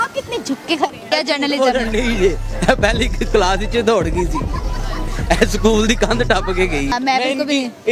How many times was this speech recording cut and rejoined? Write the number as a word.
two